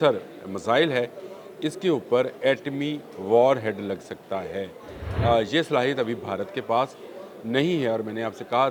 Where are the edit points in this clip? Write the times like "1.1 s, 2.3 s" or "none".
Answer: none